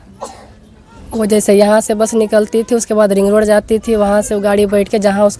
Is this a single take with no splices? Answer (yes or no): yes